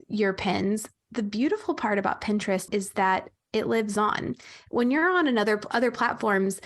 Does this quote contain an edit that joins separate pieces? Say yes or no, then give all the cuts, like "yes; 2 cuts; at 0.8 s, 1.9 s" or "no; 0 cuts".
yes; 1 cut; at 2.7 s